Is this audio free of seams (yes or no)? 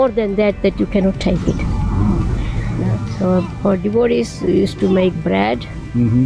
no